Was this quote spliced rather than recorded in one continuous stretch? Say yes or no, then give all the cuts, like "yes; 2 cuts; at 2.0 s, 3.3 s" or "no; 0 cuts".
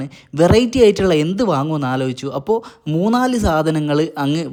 no; 0 cuts